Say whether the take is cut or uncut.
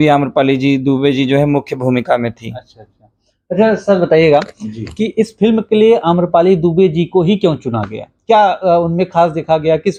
uncut